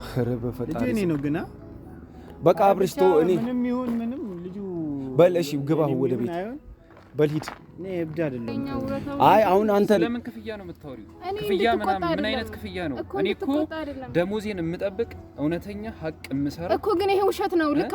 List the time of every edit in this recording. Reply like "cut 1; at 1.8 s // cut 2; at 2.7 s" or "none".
cut 1; at 8.6 s